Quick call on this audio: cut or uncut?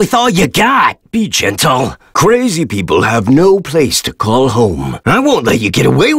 uncut